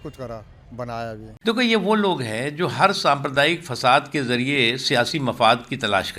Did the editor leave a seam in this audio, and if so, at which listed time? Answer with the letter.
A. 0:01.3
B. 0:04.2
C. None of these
A